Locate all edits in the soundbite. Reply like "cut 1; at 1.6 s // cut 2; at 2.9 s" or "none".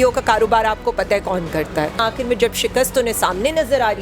cut 1; at 2.0 s